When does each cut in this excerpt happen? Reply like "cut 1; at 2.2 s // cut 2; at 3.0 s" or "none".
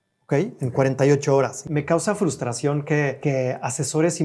cut 1; at 1.6 s // cut 2; at 3.2 s